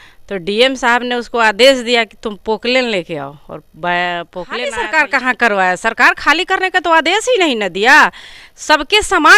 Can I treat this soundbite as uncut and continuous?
no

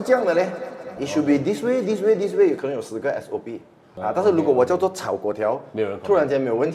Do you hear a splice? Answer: yes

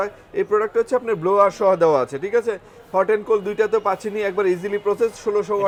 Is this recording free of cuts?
yes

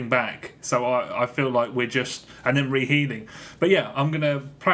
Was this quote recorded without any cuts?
yes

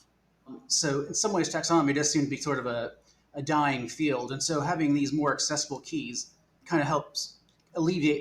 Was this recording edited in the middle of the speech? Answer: no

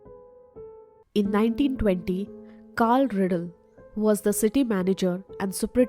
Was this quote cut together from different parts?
yes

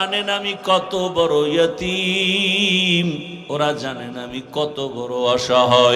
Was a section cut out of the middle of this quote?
no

